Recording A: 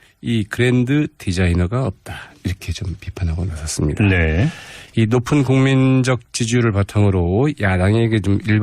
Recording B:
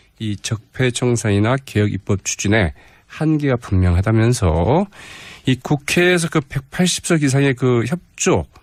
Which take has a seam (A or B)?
A